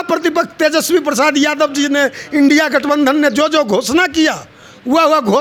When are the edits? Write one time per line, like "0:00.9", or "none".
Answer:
none